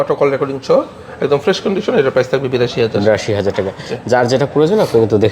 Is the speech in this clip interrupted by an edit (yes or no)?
no